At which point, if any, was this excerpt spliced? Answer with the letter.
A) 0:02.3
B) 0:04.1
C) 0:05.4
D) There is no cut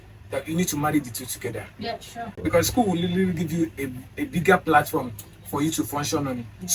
A